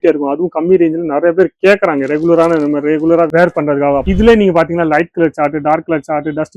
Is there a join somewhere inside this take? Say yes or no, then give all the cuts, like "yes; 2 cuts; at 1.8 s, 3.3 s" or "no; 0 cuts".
yes; 1 cut; at 4.0 s